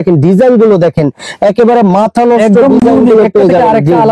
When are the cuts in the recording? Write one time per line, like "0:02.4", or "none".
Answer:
none